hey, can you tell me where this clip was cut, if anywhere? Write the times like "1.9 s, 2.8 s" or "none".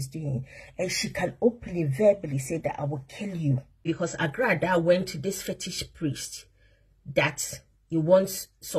3.9 s